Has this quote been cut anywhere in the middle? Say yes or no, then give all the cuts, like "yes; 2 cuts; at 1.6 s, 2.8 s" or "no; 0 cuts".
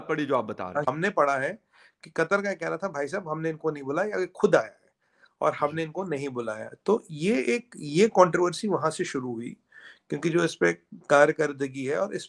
no; 0 cuts